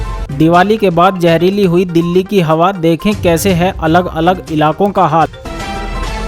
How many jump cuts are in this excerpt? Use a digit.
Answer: 1